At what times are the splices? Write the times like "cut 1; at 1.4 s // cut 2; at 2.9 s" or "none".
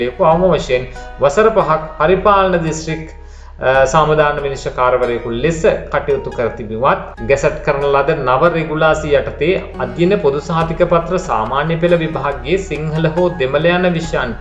cut 1; at 7.1 s